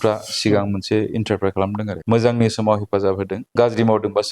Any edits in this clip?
yes; 2 cuts; at 1.9 s, 3.4 s

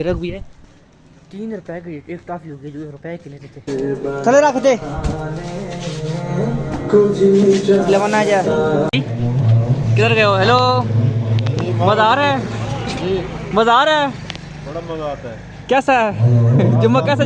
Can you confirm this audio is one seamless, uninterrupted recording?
no; 2 cuts; at 3.7 s, 8.9 s

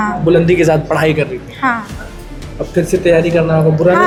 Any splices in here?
no; 0 cuts

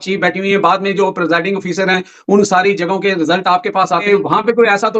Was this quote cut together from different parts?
yes; 1 cut; at 4.0 s

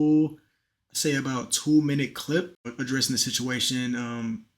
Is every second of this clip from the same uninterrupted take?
no; 1 cut; at 2.7 s

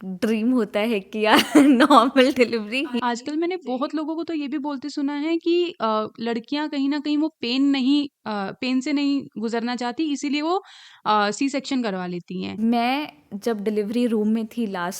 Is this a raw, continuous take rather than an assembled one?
no; 1 cut; at 12.5 s

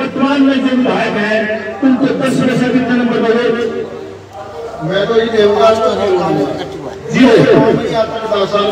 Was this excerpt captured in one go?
yes; 0 cuts

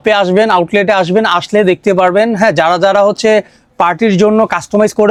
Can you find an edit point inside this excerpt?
no; 0 cuts

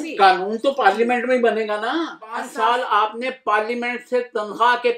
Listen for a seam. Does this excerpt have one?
yes; 1 cut; at 2.5 s

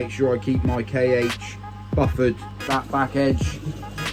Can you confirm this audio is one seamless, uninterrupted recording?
no; 1 cut; at 2.7 s

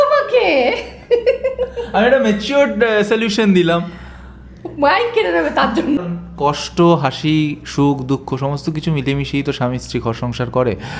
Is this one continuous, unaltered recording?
no; 1 cut; at 6.0 s

